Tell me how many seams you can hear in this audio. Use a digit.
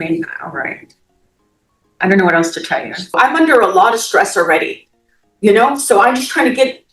1